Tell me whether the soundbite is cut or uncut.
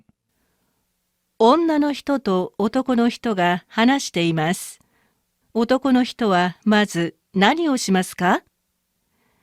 uncut